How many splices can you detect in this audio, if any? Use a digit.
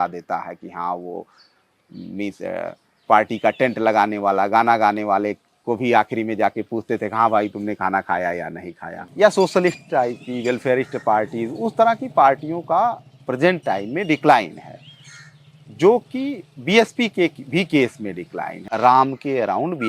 2